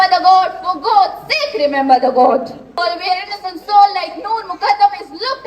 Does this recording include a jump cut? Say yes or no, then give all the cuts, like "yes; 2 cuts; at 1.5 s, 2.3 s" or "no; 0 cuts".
yes; 1 cut; at 2.8 s